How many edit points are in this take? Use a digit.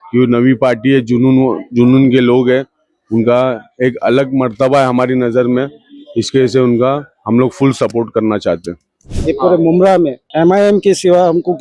2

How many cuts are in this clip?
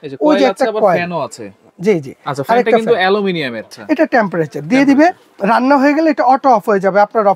1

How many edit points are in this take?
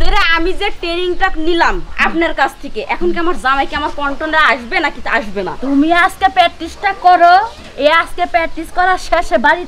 0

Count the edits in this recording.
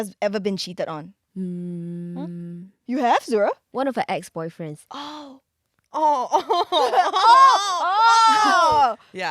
1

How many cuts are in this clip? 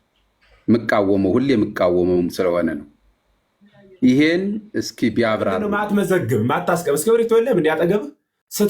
1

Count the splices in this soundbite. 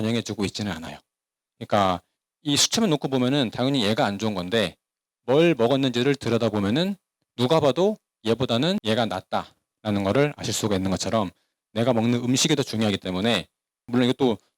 0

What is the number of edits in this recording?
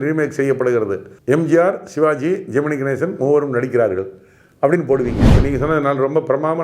2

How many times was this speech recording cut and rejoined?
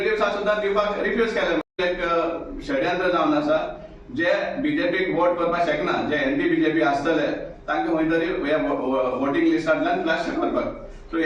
1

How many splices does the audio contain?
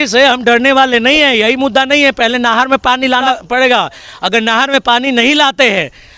1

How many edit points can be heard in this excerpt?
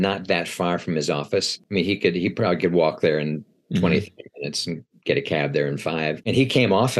2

